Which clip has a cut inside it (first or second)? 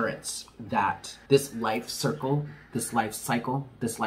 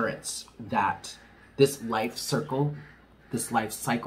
first